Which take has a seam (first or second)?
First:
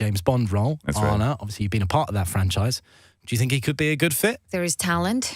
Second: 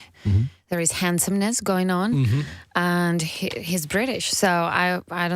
first